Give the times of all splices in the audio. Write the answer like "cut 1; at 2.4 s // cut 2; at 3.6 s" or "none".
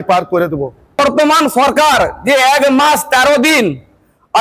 cut 1; at 1.0 s